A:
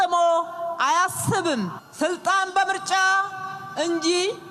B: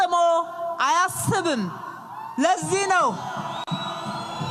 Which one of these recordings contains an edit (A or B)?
A